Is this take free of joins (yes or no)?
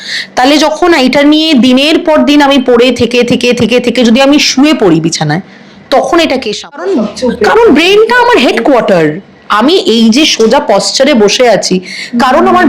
no